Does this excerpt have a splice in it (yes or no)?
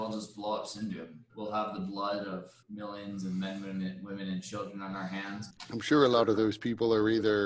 yes